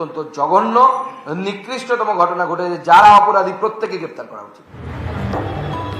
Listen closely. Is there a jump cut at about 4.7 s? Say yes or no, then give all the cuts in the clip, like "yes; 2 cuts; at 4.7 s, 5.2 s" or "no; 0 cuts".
yes; 1 cut; at 4.7 s